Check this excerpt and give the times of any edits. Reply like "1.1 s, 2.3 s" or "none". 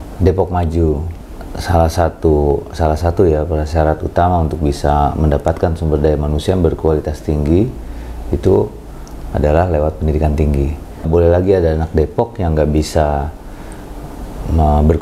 1.1 s, 11.0 s